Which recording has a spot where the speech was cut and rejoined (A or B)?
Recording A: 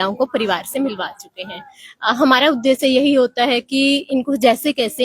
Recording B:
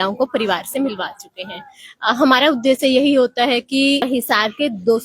B